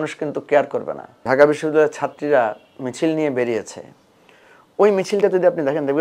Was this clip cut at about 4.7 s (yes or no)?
no